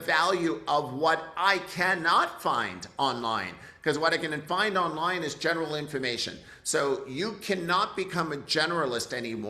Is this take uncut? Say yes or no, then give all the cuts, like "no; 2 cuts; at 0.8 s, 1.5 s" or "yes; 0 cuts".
yes; 0 cuts